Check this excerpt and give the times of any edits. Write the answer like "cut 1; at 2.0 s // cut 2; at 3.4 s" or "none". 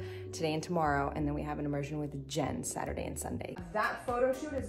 cut 1; at 3.6 s